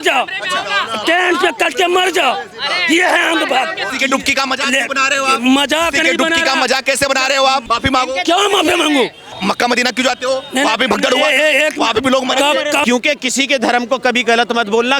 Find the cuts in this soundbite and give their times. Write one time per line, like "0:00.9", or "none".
0:03.8
0:07.6
0:09.3
0:12.8